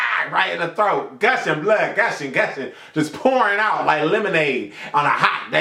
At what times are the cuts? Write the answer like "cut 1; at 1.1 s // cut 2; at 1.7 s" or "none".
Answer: none